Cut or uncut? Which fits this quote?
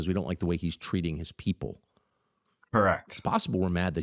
uncut